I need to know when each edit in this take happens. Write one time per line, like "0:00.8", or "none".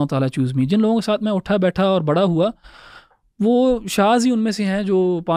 none

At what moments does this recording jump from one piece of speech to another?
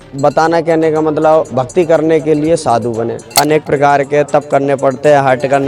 0:03.3

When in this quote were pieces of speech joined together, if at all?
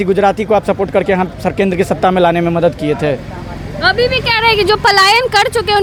none

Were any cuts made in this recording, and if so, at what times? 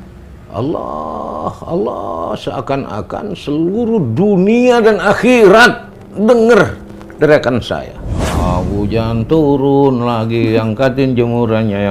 0:08.3

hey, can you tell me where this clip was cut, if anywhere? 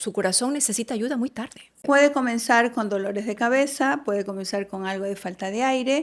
0:01.8

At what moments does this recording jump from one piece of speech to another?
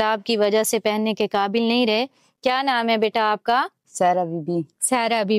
none

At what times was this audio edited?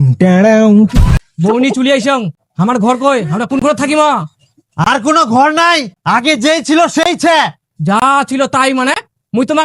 0:00.9

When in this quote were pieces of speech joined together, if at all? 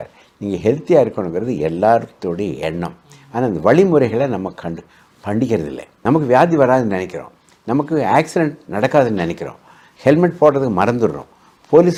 none

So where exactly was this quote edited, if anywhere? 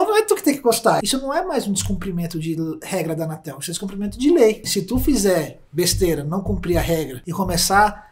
0:01.0
0:04.7
0:07.2

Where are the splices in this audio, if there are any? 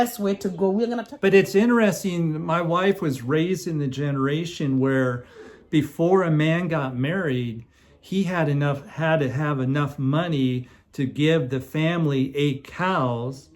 0:01.0

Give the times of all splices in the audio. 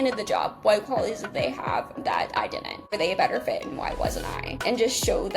0:02.9
0:04.6

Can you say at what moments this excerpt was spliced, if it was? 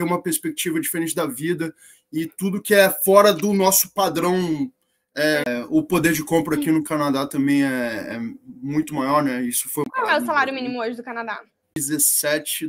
0:05.4
0:09.8
0:11.7

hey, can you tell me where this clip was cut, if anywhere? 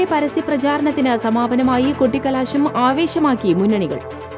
none

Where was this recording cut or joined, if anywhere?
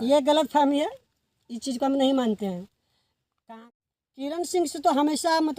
0:03.7

